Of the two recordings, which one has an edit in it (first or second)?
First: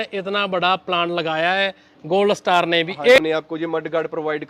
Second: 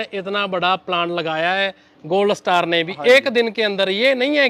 first